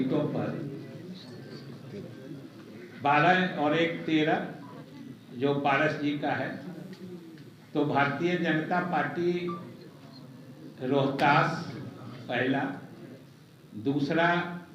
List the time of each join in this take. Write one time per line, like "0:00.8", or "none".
none